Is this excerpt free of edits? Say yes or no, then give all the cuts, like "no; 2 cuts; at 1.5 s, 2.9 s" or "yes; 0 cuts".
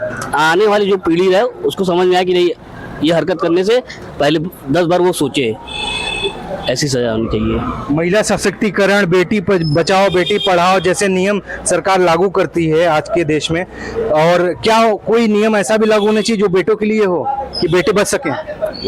yes; 0 cuts